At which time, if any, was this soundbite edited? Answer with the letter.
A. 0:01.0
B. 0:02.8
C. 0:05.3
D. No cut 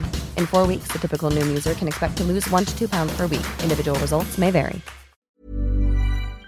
C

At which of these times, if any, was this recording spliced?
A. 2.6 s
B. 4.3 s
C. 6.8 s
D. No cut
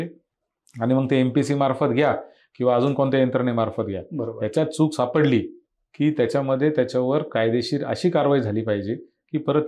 D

